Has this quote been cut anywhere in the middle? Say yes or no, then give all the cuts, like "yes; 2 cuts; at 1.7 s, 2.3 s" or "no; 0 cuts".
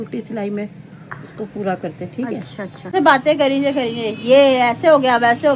yes; 1 cut; at 2.9 s